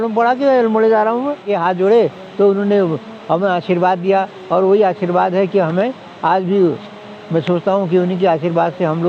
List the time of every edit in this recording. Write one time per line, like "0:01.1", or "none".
0:01.5